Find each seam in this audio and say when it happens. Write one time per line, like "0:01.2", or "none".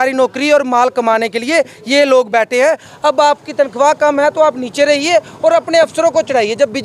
0:02.9